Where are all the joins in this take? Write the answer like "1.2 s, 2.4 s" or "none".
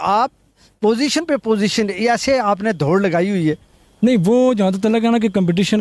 none